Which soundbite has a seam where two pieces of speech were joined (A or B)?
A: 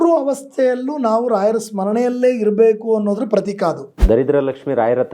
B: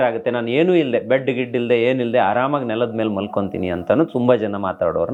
A